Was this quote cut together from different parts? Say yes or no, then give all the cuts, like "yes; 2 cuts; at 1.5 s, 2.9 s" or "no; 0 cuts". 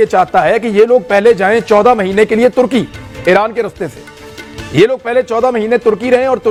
no; 0 cuts